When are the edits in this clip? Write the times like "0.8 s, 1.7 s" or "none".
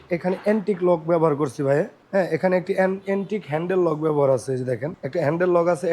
2.0 s, 4.9 s